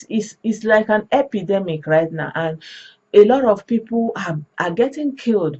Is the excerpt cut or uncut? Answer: uncut